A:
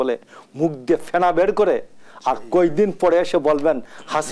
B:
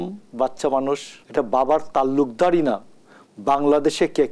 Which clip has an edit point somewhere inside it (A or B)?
B